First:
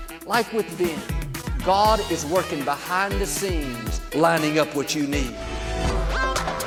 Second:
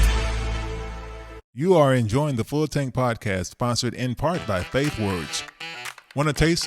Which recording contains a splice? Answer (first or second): second